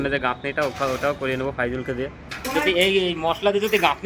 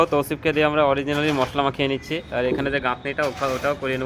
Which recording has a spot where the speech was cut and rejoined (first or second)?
first